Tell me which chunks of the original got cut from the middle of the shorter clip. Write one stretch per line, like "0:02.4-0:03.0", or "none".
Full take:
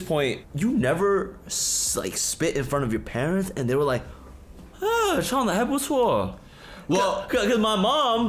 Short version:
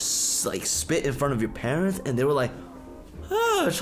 none